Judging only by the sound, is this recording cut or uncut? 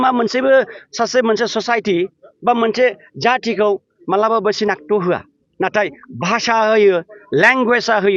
uncut